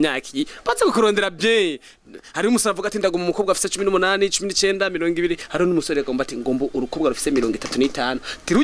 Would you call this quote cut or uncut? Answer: uncut